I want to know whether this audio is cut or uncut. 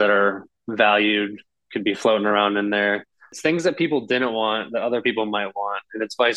cut